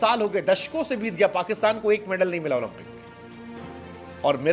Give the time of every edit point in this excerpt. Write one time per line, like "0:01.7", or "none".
none